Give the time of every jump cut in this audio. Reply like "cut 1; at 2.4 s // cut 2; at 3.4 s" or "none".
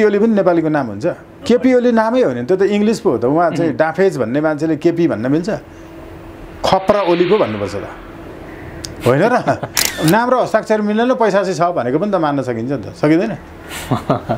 cut 1; at 1.3 s // cut 2; at 9.9 s

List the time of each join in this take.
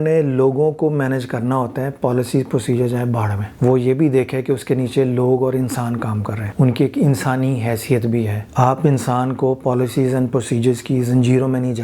cut 1; at 3.4 s // cut 2; at 6.4 s // cut 3; at 8.4 s

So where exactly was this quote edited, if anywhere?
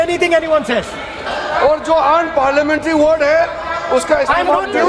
cut 1; at 1.3 s

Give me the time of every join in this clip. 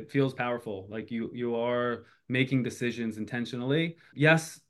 none

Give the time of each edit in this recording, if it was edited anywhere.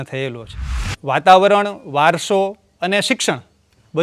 cut 1; at 0.9 s

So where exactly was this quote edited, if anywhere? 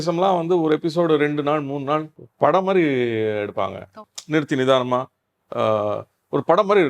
cut 1; at 2.2 s // cut 2; at 4.1 s

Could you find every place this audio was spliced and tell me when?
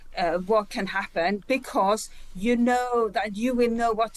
none

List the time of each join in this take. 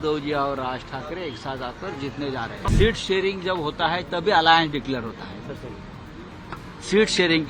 cut 1; at 2.7 s

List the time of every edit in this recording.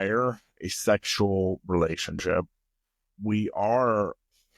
none

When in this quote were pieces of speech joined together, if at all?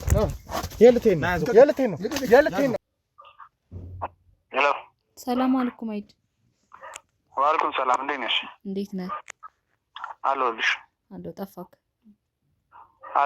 cut 1; at 2.9 s

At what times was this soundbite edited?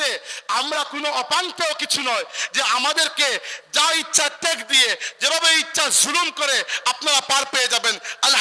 none

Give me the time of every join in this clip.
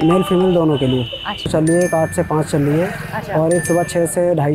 cut 1; at 1.5 s

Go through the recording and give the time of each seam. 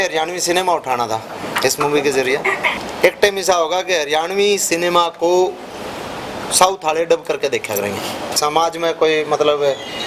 cut 1; at 2.8 s // cut 2; at 8.3 s

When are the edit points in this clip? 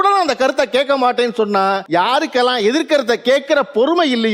cut 1; at 1.8 s

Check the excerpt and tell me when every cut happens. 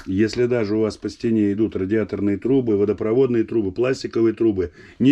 none

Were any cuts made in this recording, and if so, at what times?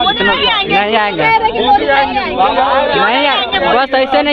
none

